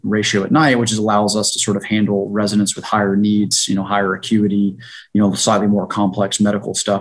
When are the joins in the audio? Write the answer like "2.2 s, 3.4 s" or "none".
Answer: none